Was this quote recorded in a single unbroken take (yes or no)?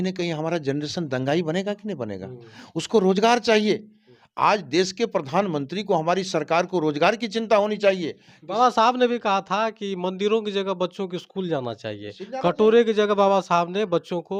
yes